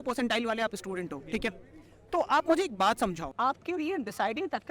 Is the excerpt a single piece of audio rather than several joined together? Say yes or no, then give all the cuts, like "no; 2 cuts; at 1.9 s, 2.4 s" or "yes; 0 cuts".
no; 1 cut; at 3.3 s